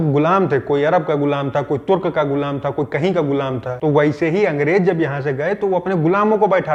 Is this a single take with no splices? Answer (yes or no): yes